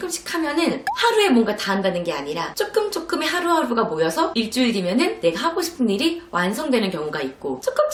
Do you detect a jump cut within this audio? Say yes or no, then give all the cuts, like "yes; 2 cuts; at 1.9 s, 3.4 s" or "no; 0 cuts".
no; 0 cuts